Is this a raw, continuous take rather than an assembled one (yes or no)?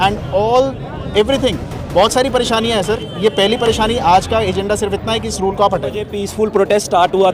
no